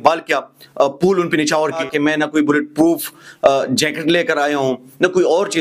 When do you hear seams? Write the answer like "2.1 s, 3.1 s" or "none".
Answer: 1.8 s

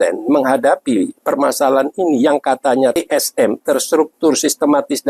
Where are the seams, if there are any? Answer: 2.9 s

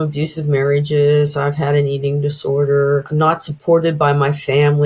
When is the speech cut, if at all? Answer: 3.1 s

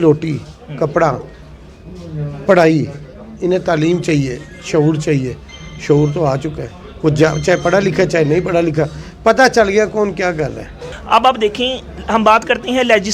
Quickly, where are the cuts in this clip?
none

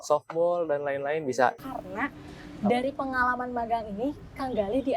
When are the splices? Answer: 1.6 s

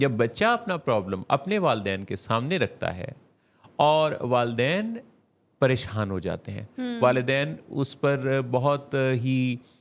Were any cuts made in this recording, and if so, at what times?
none

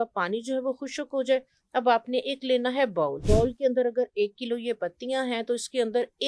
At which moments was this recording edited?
3.2 s

